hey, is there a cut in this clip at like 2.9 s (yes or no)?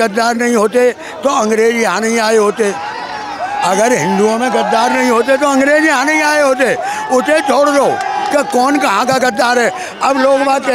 no